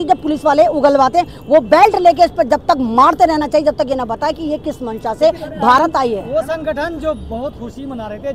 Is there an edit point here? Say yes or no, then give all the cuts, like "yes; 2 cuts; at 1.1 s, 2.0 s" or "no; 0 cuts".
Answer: no; 0 cuts